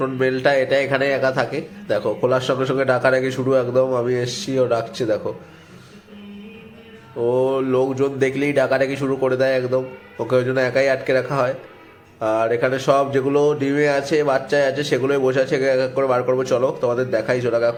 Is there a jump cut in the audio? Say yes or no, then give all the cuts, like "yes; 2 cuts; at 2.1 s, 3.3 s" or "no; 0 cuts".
no; 0 cuts